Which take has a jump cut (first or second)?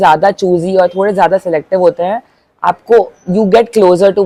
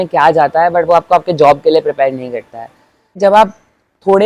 second